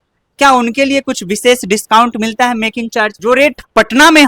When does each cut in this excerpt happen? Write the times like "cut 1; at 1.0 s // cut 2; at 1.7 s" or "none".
cut 1; at 3.1 s